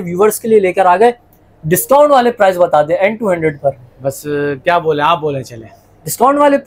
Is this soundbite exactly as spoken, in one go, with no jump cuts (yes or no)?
yes